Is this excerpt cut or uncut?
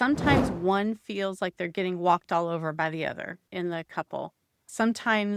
uncut